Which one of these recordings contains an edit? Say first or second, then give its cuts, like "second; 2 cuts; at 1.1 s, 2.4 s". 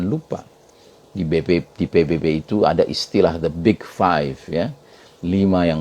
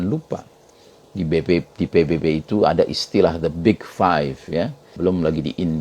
second; 1 cut; at 4.9 s